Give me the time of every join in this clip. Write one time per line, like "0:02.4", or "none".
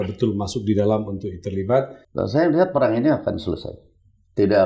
0:02.0